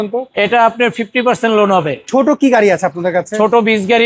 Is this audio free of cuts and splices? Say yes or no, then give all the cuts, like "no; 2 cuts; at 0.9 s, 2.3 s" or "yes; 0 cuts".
no; 1 cut; at 2.0 s